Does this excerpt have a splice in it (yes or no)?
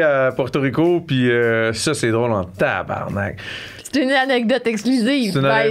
no